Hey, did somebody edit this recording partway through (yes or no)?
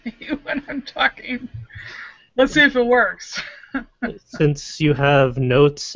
yes